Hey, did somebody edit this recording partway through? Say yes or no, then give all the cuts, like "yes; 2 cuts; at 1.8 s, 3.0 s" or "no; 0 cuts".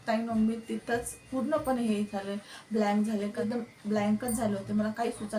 yes; 1 cut; at 3.4 s